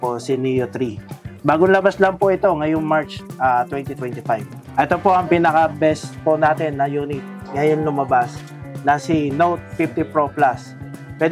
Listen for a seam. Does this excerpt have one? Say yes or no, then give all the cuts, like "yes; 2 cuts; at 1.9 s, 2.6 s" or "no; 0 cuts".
yes; 1 cut; at 4.6 s